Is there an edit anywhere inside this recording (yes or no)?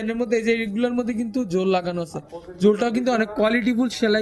no